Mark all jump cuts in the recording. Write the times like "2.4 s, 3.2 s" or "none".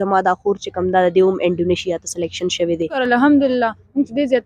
3.0 s